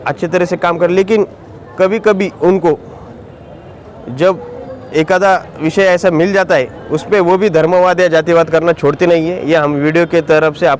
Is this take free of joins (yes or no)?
yes